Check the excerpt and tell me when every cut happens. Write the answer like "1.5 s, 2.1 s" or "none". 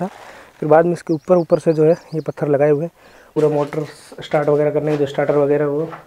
3.3 s

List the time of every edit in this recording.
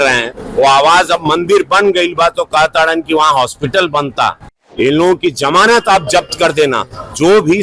4.6 s

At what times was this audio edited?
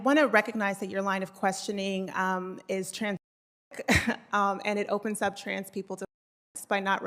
none

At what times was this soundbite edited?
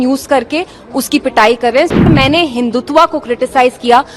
2.1 s

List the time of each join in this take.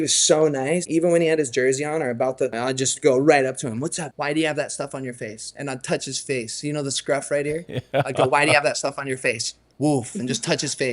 0.8 s, 2.5 s, 4.1 s

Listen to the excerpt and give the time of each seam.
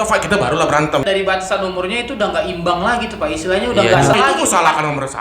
1.0 s, 4.1 s

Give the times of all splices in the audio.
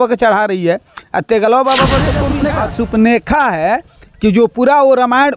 2.3 s

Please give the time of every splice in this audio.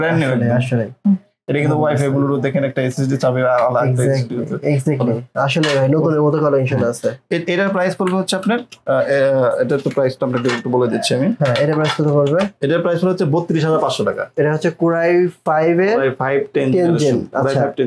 none

